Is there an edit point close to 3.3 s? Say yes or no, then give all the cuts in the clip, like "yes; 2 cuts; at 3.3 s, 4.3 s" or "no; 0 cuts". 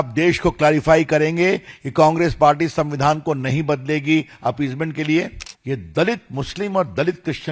no; 1 cut; at 5.5 s